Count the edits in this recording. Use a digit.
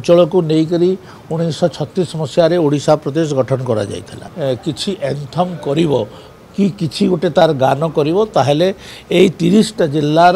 1